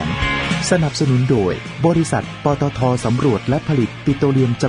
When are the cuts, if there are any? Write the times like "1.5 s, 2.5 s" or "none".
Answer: none